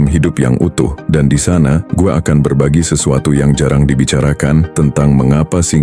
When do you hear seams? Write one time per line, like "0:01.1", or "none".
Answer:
0:01.0
0:04.7